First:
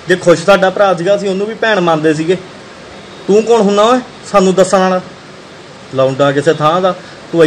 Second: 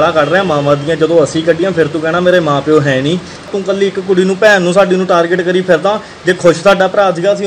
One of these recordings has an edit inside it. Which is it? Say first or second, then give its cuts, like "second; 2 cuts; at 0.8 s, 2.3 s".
second; 1 cut; at 3.5 s